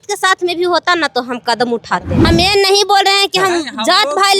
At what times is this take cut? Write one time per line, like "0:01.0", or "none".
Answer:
0:02.3